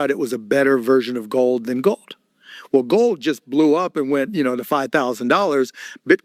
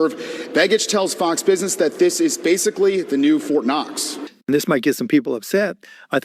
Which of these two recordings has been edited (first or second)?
second